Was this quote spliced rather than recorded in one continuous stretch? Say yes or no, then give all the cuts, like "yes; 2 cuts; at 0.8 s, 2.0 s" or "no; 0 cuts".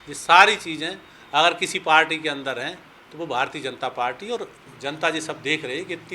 yes; 1 cut; at 4.6 s